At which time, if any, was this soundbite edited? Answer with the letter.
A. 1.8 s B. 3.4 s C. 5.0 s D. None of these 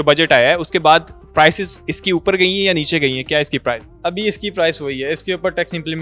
D